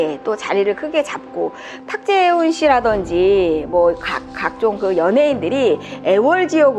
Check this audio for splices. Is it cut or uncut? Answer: cut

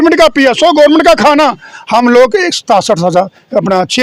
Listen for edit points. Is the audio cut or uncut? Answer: uncut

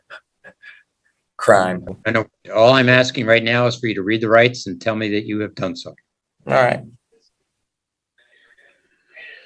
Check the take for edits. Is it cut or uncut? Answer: uncut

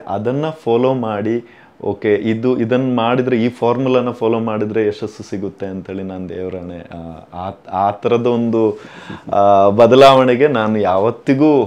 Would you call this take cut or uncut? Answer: uncut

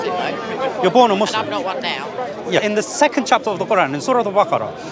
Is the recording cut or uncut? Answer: cut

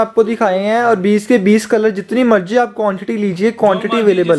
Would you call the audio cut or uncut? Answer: uncut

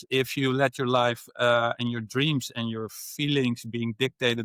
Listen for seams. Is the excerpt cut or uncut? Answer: uncut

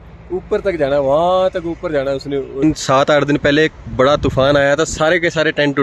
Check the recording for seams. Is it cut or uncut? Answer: cut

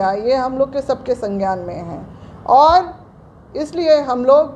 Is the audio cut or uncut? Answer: uncut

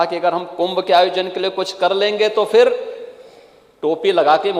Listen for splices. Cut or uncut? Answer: uncut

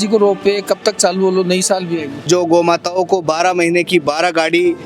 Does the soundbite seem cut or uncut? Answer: cut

